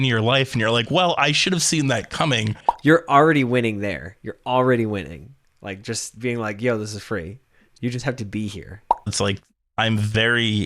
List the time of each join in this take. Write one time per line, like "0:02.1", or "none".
0:02.7
0:09.0

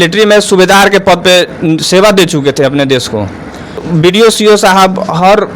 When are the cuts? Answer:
0:03.8

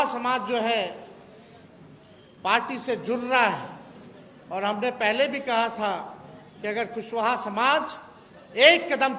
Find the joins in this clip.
none

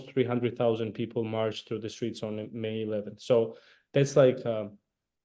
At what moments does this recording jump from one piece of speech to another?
none

